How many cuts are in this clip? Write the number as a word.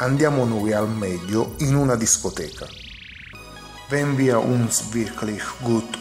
zero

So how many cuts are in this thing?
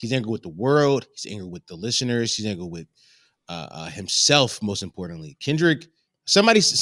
zero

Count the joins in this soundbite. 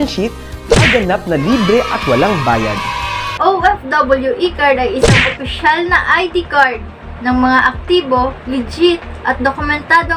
one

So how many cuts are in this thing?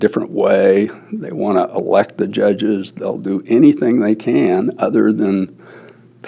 one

